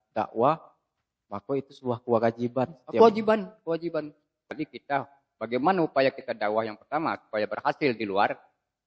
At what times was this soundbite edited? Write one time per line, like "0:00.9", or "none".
0:04.5

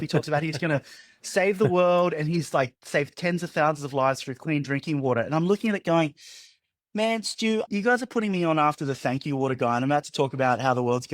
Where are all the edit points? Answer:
none

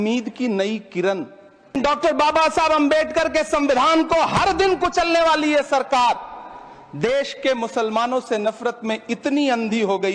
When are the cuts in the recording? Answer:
0:01.7

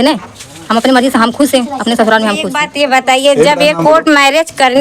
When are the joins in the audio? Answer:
0:02.6

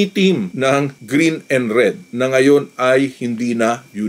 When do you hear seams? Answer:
none

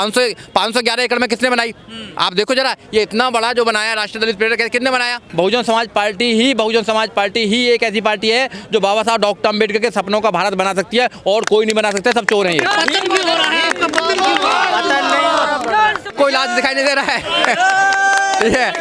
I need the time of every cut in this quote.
0:05.2

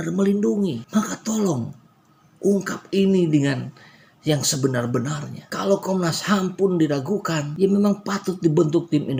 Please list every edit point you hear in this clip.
none

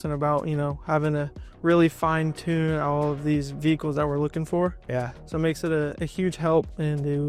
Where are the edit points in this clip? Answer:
none

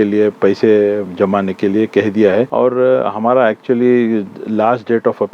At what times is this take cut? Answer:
0:02.5

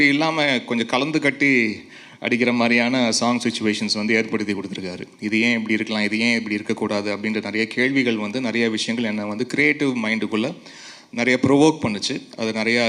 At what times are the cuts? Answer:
none

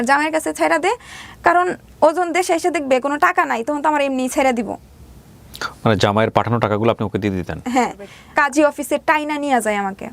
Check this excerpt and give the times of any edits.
0:08.1

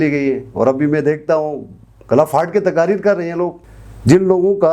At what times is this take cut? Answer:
0:03.7

